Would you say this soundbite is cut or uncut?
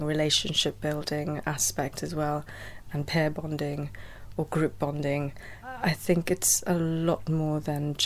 uncut